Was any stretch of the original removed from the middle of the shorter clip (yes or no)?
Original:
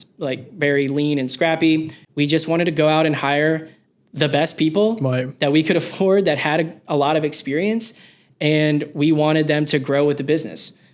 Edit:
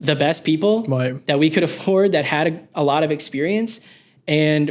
no